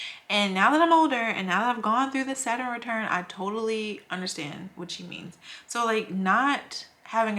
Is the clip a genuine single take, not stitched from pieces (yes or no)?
yes